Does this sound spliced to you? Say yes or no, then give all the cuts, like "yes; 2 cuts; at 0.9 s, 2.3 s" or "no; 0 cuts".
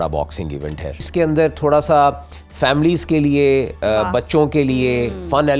yes; 1 cut; at 1.1 s